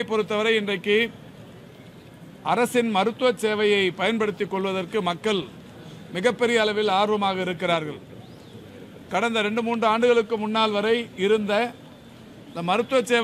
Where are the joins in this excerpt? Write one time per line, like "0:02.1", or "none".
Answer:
none